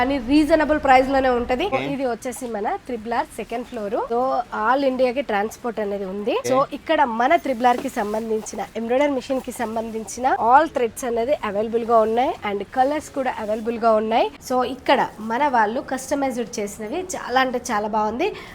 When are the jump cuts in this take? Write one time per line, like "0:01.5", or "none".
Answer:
0:01.7
0:04.1
0:06.4
0:10.4
0:14.4

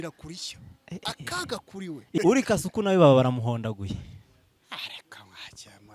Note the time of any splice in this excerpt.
0:02.2

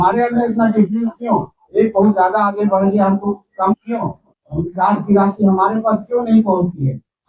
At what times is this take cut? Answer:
none

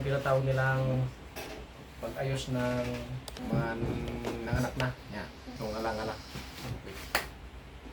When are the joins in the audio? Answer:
0:03.4
0:05.5

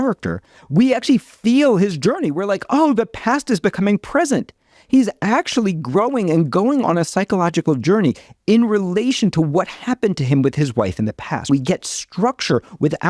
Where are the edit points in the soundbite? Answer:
0:11.5

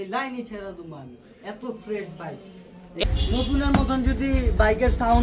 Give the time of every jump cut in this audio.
0:03.0

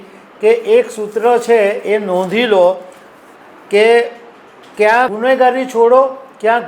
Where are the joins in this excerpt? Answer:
0:05.1

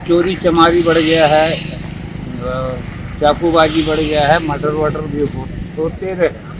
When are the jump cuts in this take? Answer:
none

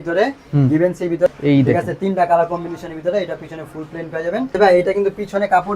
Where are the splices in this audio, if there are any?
0:01.3
0:04.5

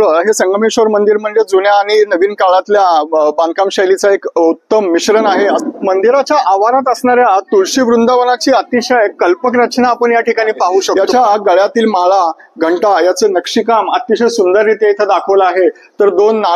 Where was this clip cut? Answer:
0:05.6
0:10.9

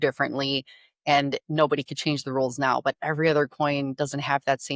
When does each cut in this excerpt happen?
none

